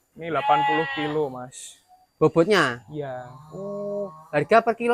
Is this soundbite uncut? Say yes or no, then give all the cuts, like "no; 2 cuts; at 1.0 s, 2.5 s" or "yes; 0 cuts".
yes; 0 cuts